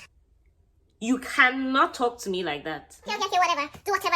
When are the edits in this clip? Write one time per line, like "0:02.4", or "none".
0:03.1